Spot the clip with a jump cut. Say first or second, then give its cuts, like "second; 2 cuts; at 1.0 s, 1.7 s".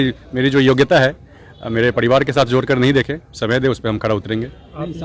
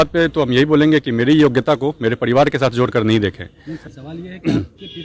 second; 1 cut; at 4.0 s